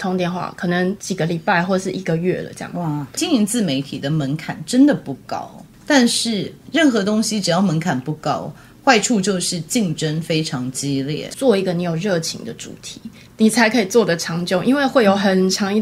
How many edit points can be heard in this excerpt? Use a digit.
3